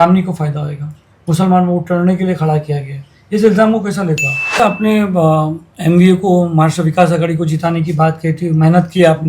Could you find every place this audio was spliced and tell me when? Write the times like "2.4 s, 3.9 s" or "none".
4.6 s

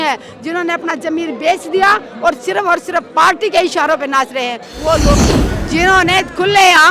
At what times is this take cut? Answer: 5.1 s

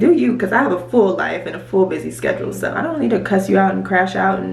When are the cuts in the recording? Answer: 2.8 s

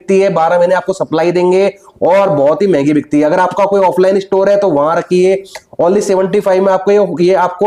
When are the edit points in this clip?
none

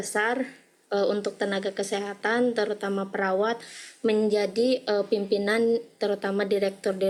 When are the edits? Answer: none

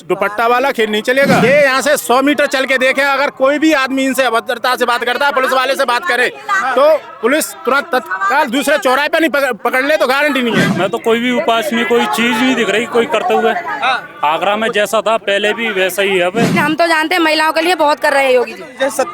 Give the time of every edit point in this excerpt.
1.4 s, 10.7 s, 16.5 s

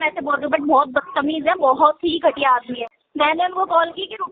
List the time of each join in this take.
2.8 s

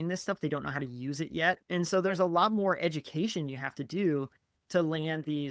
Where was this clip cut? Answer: 1.6 s

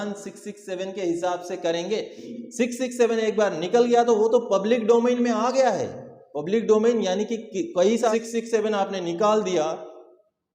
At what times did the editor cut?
2.3 s, 8.1 s

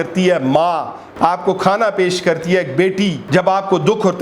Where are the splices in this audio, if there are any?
1.0 s, 3.2 s

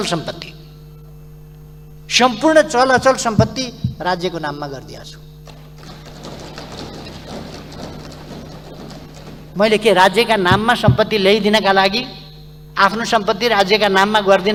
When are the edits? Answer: none

